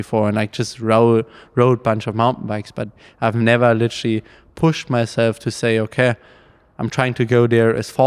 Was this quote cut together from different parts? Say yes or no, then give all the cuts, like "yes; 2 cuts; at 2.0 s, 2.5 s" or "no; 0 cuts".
no; 0 cuts